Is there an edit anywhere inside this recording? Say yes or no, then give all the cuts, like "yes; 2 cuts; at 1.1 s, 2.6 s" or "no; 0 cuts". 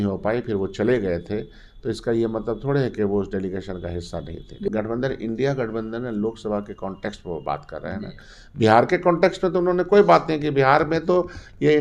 yes; 1 cut; at 4.7 s